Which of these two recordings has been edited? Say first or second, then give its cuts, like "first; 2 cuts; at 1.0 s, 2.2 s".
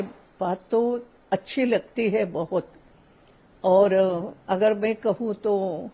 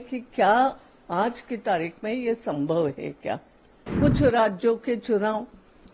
second; 1 cut; at 3.9 s